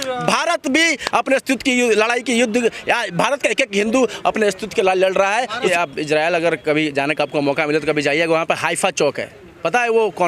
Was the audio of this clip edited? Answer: yes; 1 cut; at 5.6 s

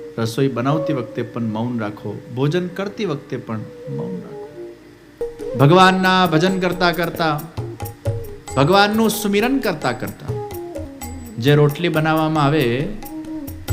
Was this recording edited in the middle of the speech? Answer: yes; 2 cuts; at 5.3 s, 10.9 s

